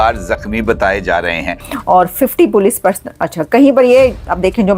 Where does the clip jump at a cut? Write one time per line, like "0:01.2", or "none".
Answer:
0:01.7